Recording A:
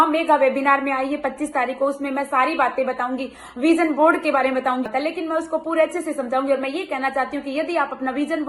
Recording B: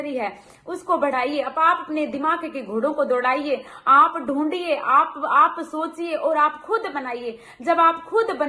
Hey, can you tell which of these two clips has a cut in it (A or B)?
A